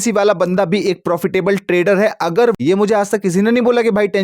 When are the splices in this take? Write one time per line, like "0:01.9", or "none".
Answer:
0:02.6